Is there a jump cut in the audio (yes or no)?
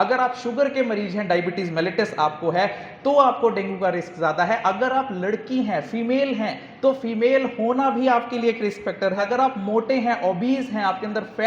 yes